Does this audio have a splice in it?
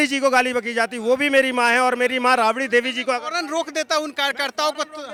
no; 0 cuts

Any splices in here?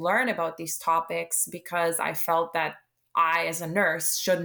no; 0 cuts

